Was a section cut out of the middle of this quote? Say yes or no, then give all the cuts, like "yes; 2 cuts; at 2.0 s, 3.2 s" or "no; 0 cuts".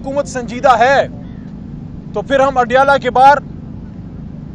no; 0 cuts